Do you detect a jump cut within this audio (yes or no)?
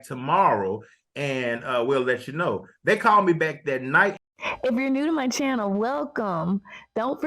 yes